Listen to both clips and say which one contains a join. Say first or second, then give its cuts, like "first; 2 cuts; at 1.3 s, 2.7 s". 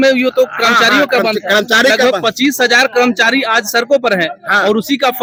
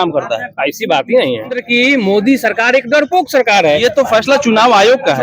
second; 1 cut; at 1.6 s